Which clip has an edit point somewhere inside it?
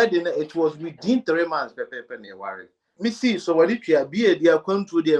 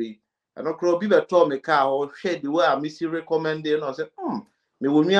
first; 1 cut; at 3.0 s

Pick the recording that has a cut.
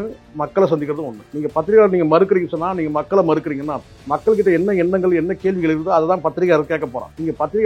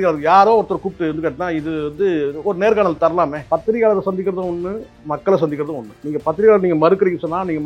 second; 1 cut; at 3.4 s

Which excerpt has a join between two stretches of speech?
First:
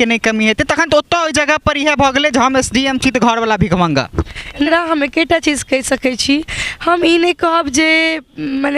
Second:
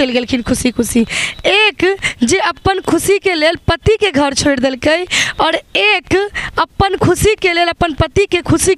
first; 1 cut; at 4.7 s

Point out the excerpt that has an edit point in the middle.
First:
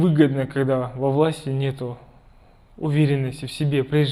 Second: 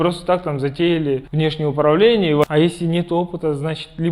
second; 2 cuts; at 1.3 s, 2.4 s

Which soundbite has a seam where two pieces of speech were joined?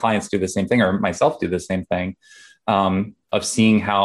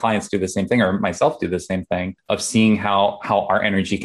second; 1 cut; at 2.2 s

